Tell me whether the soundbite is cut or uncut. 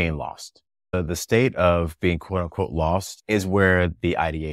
cut